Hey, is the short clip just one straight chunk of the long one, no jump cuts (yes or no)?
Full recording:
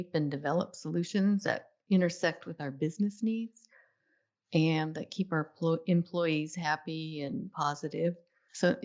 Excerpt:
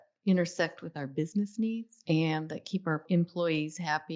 no